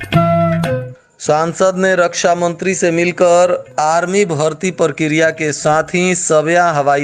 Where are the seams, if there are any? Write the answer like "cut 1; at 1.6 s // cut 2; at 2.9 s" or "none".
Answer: cut 1; at 0.9 s